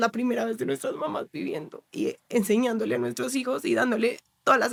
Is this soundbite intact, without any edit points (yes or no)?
yes